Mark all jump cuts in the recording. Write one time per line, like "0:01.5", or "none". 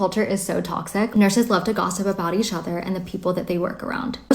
0:01.1